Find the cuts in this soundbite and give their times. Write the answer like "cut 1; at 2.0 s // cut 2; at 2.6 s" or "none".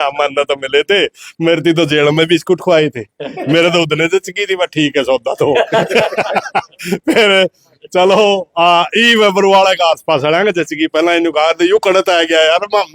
none